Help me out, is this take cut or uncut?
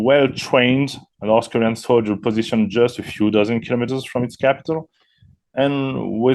uncut